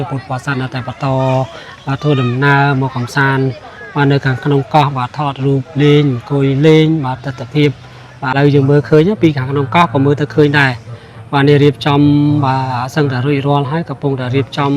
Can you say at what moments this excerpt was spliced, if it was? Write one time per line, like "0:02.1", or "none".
0:08.3